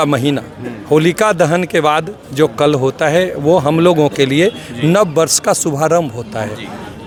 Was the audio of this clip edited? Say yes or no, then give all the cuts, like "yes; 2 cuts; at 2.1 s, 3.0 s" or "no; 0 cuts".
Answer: no; 0 cuts